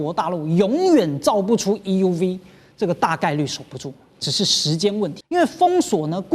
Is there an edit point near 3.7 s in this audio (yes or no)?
no